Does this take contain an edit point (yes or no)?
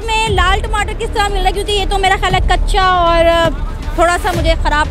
no